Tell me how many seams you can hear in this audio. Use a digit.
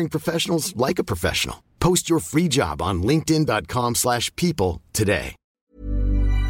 1